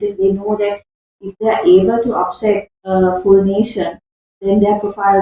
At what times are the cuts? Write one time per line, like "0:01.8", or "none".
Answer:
none